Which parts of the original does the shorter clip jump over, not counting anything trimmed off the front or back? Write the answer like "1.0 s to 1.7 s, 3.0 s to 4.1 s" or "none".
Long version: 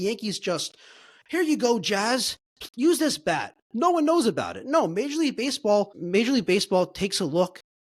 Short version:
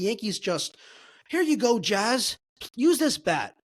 none